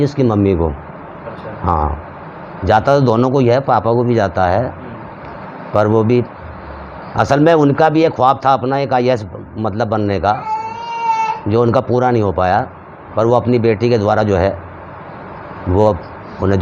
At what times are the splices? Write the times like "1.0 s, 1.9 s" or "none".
none